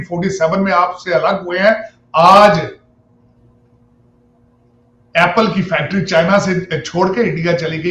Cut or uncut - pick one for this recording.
uncut